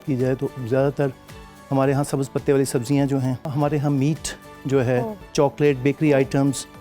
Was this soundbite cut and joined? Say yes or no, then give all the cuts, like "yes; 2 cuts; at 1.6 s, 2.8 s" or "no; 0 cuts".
yes; 2 cuts; at 3.5 s, 5.3 s